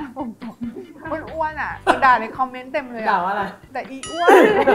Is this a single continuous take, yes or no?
no